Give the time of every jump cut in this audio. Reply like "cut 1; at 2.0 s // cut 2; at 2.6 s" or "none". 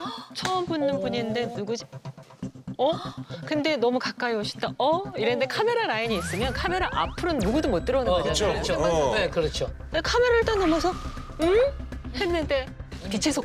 none